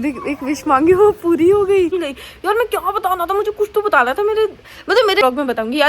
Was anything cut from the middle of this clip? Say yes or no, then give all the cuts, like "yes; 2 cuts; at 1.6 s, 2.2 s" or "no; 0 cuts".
yes; 2 cuts; at 1.9 s, 5.2 s